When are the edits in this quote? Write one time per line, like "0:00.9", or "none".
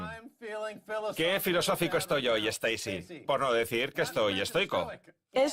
0:03.6